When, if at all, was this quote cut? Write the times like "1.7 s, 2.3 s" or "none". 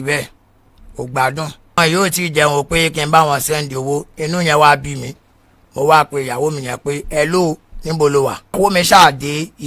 1.8 s, 8.6 s